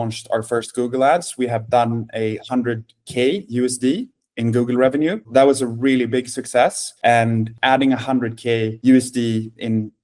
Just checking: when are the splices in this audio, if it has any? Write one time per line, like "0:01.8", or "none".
0:05.2
0:07.5